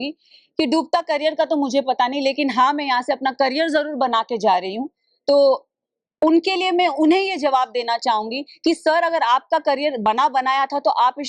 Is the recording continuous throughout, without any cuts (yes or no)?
yes